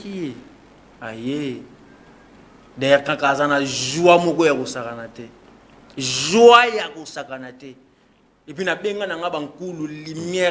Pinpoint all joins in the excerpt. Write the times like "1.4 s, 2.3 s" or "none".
none